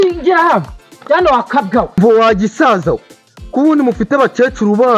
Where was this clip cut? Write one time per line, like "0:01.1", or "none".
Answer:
0:02.0